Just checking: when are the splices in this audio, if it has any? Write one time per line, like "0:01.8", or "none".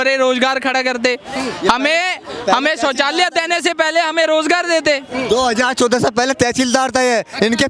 none